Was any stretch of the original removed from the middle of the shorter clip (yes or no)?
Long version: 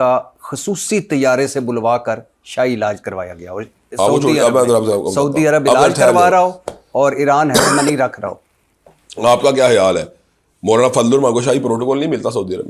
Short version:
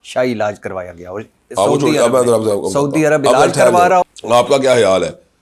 yes